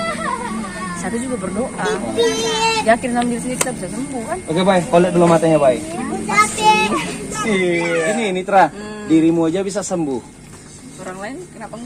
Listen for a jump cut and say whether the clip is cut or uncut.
cut